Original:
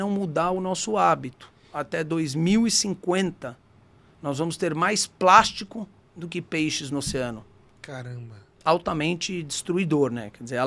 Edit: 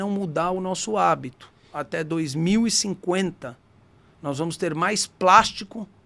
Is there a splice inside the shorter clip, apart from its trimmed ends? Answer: no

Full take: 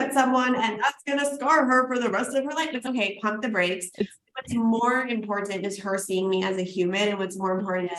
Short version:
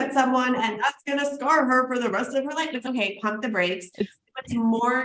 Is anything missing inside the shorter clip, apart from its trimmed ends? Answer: no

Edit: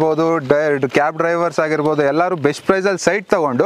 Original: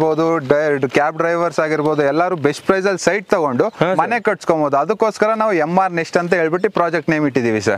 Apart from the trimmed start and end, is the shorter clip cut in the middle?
no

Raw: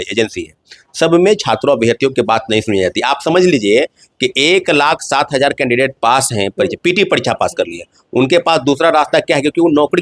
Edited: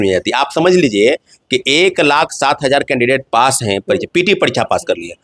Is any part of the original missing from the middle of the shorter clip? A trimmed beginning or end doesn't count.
no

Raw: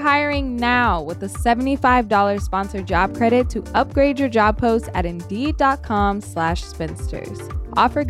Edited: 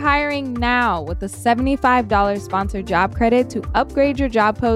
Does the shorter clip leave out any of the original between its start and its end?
no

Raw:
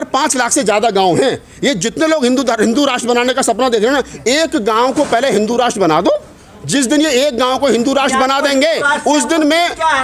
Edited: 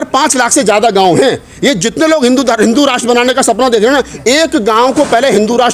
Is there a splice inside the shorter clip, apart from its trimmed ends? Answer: no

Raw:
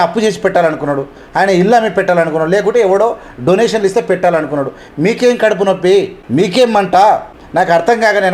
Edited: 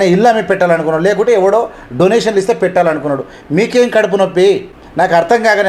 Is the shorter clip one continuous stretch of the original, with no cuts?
no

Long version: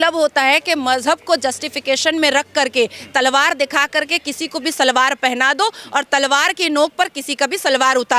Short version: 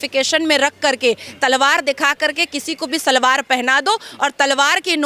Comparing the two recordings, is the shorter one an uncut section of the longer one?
yes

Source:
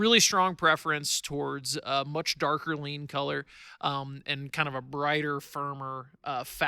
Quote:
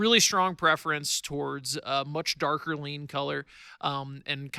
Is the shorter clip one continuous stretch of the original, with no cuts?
yes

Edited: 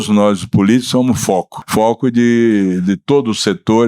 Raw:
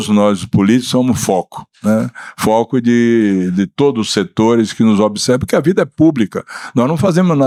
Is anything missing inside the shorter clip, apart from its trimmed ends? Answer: yes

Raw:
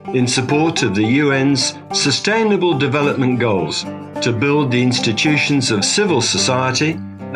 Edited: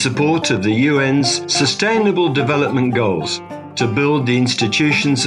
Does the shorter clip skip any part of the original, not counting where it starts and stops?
yes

